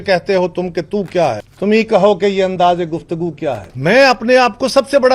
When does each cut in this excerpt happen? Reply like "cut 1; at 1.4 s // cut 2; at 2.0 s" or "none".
cut 1; at 3.7 s